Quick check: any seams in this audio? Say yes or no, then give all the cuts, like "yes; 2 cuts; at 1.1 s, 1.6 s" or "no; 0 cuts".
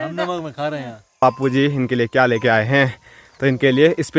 yes; 1 cut; at 1.2 s